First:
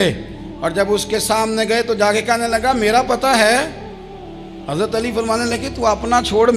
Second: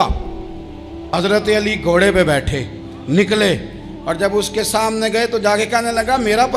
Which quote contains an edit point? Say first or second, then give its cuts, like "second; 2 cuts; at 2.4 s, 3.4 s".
second; 1 cut; at 1.1 s